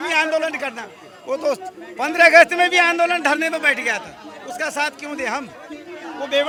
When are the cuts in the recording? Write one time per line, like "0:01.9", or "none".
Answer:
none